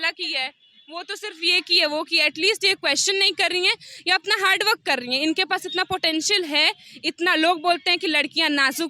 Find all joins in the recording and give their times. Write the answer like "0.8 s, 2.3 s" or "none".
none